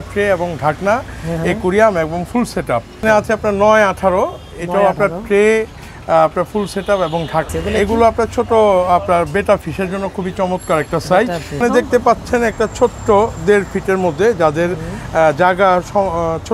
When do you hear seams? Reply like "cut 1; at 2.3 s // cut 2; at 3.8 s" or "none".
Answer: cut 1; at 3.0 s // cut 2; at 7.5 s // cut 3; at 11.6 s